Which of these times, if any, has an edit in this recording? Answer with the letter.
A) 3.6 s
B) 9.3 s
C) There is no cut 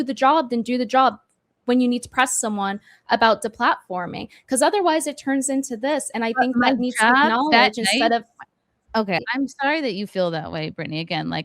B